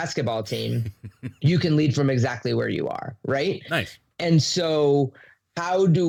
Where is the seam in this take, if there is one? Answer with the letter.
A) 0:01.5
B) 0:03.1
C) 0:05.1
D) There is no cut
D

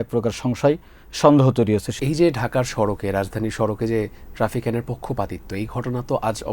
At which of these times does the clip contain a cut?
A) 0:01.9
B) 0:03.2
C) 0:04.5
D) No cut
A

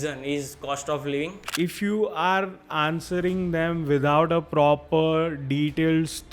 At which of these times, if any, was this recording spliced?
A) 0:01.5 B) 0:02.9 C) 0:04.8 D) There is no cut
A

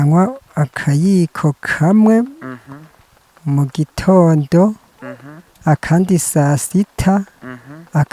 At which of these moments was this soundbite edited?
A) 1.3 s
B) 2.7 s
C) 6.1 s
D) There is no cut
D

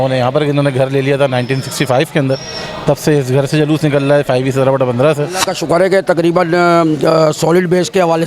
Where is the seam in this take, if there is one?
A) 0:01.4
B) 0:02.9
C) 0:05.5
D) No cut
C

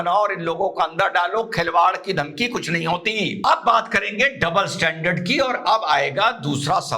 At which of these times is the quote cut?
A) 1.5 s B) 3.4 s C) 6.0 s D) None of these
B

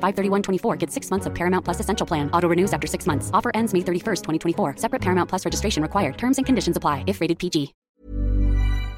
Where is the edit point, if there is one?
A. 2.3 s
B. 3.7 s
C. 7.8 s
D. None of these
C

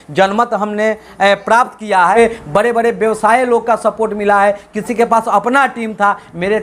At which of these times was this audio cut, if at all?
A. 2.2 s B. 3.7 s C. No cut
A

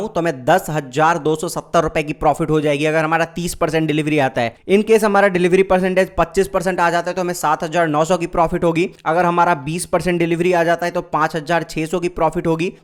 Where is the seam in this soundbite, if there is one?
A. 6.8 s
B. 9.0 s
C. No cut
C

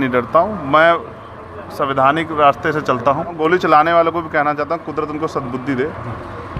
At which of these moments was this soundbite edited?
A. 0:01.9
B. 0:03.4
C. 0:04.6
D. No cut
B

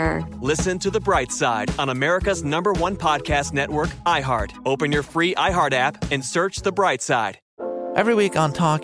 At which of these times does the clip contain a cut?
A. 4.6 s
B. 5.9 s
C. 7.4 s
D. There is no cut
C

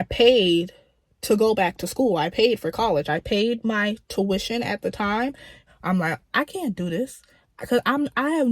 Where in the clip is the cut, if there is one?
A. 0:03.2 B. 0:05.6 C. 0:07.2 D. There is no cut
B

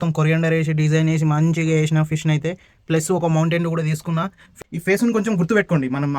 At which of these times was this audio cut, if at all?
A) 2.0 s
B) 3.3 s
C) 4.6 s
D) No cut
C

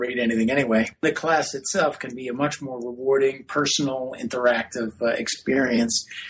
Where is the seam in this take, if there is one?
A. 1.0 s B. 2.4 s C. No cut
A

